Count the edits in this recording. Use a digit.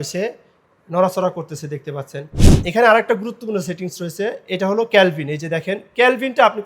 1